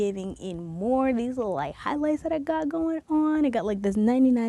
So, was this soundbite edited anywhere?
no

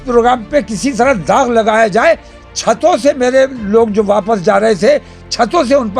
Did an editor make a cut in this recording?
no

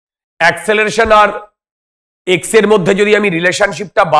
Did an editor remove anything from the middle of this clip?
no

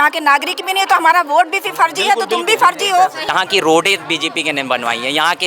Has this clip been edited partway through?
yes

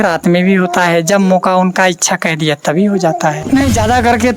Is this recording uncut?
no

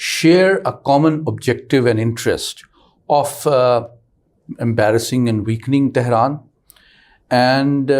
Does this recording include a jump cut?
no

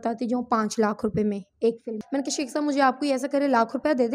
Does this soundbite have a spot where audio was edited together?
yes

